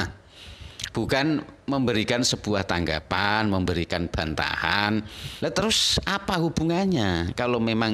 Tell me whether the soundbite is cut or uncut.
cut